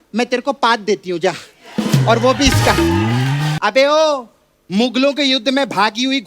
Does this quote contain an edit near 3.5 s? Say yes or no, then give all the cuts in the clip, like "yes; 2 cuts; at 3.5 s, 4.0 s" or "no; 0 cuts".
yes; 1 cut; at 3.5 s